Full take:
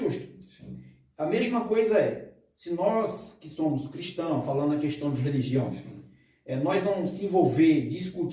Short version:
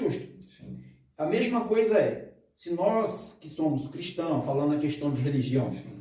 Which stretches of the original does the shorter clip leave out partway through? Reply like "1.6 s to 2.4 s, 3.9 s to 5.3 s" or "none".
none